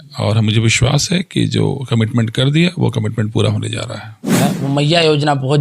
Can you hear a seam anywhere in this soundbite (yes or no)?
yes